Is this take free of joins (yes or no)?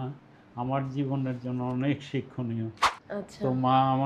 no